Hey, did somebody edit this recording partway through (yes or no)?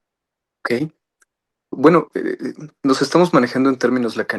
yes